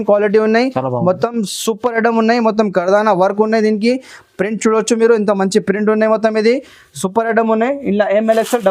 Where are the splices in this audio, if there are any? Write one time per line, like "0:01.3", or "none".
none